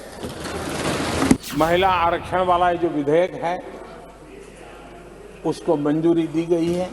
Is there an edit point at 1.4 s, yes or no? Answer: yes